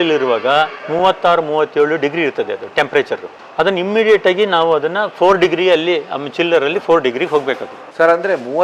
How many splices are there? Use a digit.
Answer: 0